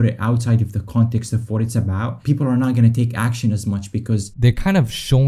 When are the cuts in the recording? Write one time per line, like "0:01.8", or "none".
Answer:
0:02.1
0:04.3